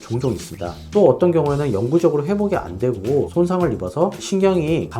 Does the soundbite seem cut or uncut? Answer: cut